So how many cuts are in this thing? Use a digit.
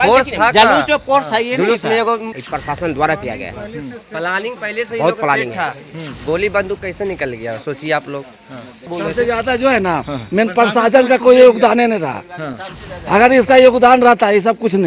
2